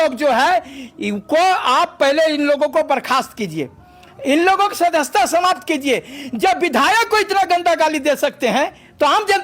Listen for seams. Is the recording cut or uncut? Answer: uncut